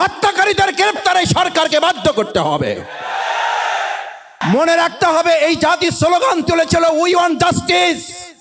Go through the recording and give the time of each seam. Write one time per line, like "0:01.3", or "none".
0:04.4